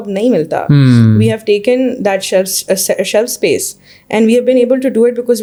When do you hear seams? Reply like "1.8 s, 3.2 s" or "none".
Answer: none